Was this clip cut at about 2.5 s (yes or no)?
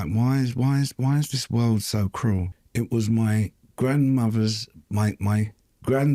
yes